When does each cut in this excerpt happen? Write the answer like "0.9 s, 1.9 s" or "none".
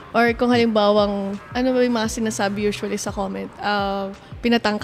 1.5 s